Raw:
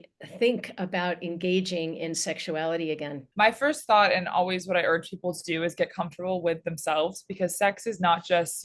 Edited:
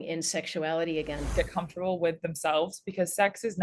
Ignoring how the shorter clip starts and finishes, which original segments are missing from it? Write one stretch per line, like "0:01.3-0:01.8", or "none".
0:03.2-0:05.7